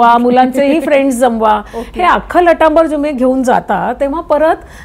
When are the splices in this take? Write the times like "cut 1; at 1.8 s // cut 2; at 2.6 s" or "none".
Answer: none